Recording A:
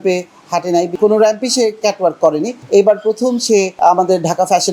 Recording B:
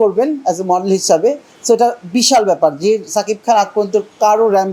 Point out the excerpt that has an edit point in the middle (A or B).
A